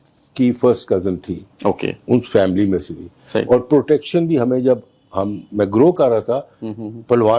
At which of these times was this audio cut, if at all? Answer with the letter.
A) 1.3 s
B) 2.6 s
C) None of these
C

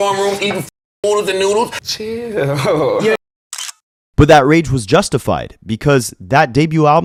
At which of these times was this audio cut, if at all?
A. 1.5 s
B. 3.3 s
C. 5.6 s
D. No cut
D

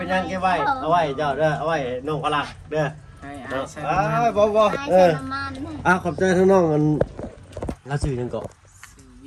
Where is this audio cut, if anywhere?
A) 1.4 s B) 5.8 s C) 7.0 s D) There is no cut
D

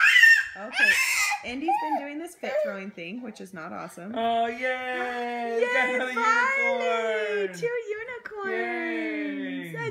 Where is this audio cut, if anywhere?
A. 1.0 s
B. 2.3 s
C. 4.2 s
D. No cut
D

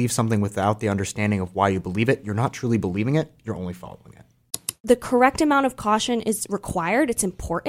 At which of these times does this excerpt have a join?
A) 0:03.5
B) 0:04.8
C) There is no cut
B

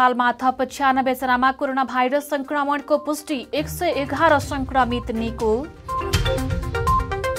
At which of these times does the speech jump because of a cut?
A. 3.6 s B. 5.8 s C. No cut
B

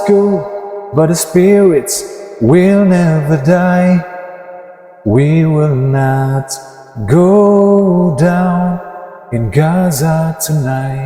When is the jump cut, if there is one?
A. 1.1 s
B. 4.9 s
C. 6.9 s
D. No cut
D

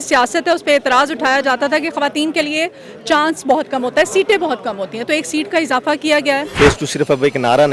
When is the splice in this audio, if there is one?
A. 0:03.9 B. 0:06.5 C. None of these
B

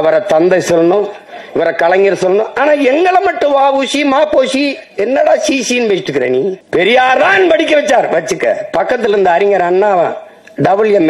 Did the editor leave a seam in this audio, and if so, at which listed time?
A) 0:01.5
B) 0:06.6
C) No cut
B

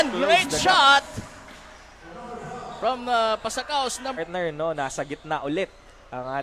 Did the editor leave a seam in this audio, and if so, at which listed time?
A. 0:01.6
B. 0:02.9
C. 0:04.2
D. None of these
C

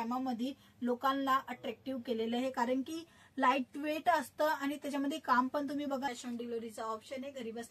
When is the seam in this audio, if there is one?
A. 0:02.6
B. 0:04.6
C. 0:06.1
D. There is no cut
C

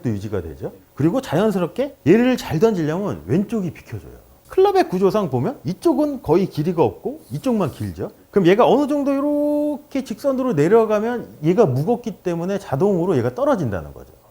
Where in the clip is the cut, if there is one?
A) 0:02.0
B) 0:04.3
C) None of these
B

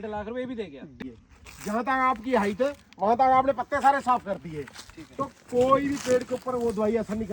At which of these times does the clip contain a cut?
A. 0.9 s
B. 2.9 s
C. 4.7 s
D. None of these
A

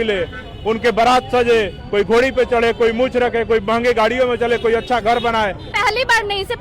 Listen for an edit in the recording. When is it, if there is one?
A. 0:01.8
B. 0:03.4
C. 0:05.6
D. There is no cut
C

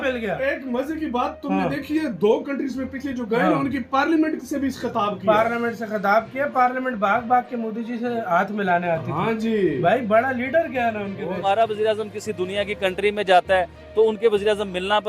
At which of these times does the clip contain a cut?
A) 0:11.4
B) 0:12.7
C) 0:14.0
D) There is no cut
A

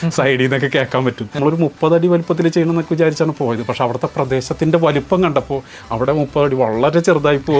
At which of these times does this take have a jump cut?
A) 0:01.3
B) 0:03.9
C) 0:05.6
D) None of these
A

